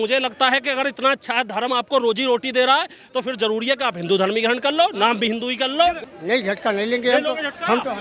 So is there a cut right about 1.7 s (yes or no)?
no